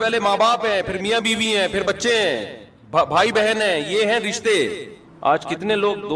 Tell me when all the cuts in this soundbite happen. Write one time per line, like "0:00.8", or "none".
none